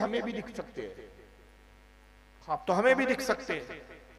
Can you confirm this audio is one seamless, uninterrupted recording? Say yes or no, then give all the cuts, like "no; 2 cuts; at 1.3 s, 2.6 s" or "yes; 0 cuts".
yes; 0 cuts